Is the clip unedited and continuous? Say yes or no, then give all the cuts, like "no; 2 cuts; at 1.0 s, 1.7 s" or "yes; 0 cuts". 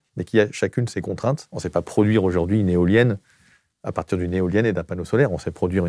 no; 1 cut; at 1.5 s